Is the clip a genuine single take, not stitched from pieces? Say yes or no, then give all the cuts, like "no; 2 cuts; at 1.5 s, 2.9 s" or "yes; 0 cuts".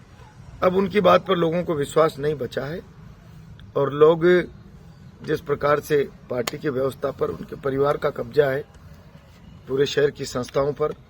yes; 0 cuts